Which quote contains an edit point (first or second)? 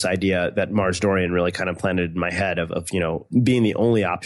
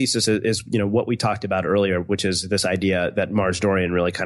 first